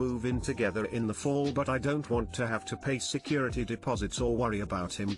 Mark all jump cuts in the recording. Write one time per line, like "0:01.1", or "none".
none